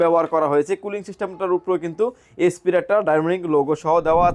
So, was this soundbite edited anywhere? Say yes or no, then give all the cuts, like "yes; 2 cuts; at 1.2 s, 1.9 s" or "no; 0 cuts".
no; 0 cuts